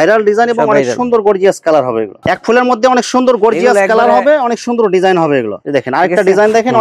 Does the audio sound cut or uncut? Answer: cut